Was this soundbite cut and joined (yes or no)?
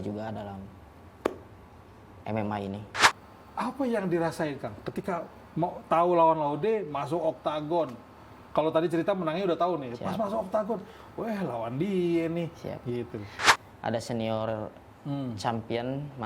yes